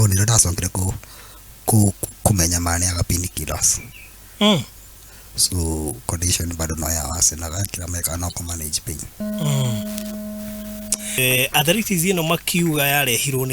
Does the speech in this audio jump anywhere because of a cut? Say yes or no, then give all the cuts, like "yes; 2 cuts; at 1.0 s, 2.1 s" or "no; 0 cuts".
yes; 1 cut; at 11.2 s